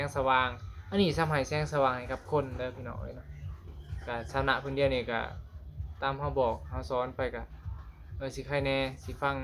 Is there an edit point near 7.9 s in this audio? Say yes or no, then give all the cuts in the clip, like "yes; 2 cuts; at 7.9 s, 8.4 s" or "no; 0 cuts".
no; 0 cuts